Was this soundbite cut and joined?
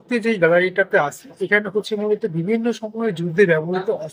no; 0 cuts

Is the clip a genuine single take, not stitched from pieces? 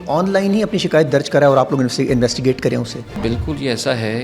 no; 1 cut; at 3.2 s

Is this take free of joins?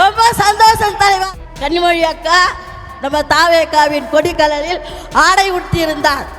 no; 1 cut; at 1.2 s

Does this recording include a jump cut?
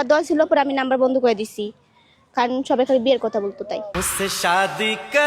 no; 0 cuts

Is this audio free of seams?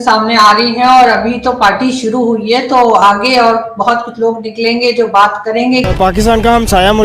no; 1 cut; at 5.9 s

